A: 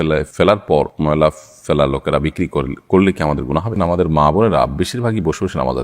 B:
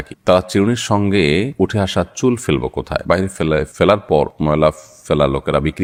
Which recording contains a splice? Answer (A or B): A